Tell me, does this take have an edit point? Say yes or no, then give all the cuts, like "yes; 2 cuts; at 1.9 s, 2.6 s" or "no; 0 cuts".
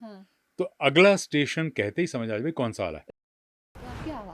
yes; 1 cut; at 3.4 s